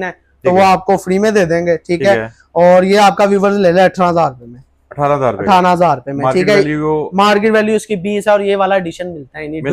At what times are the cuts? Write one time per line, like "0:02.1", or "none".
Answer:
none